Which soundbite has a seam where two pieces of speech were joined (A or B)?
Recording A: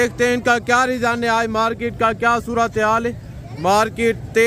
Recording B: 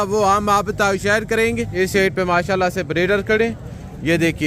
B